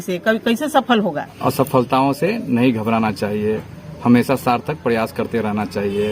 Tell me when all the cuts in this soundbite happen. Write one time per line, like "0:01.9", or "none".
0:01.3